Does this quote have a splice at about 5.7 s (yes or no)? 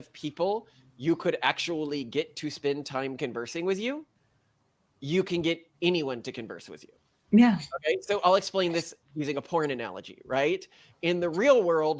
no